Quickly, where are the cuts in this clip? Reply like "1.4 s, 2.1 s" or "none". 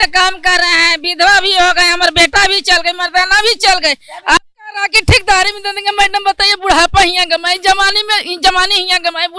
none